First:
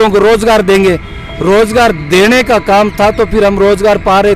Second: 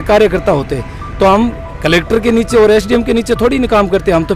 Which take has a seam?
second; 1 cut; at 1.7 s

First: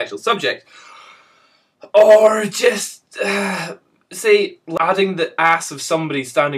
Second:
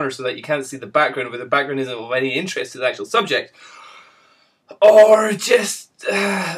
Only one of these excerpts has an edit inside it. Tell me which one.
first; 1 cut; at 4.6 s

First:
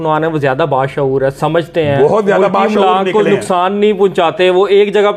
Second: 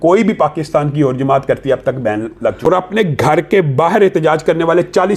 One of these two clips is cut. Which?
second; 1 cut; at 2.6 s

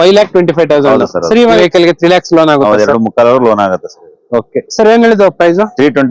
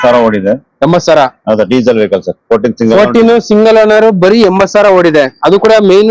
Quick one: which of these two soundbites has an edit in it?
first; 1 cut; at 1.6 s

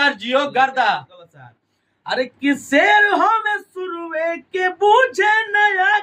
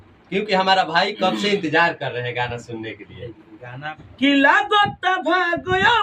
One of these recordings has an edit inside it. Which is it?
second; 1 cut; at 4.0 s

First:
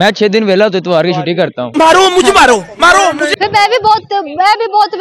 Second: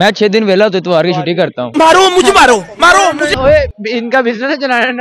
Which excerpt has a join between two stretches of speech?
second; 1 cut; at 3.4 s

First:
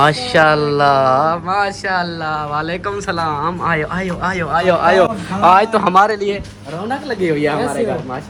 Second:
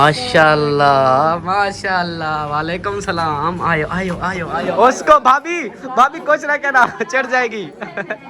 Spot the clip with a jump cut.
second; 1 cut; at 4.5 s

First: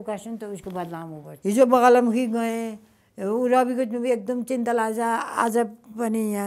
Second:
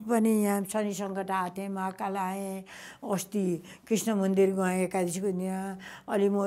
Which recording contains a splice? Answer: first; 1 cut; at 1.3 s

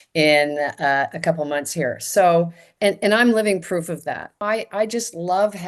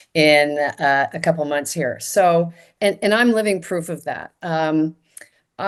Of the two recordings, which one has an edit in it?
first; 1 cut; at 4.4 s

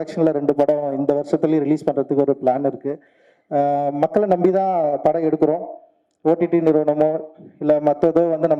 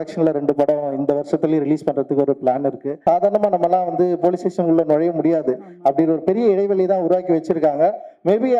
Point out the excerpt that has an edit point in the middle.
second; 1 cut; at 3.0 s

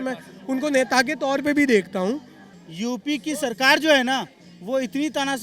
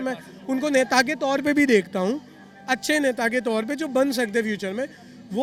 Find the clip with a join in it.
first; 1 cut; at 2.5 s

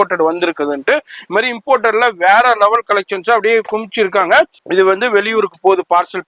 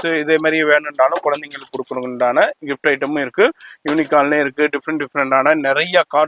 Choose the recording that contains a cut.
first; 1 cut; at 4.6 s

